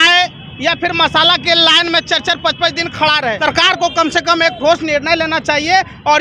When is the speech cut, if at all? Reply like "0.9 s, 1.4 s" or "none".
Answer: 3.4 s